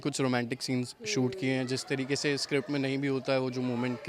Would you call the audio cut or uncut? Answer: uncut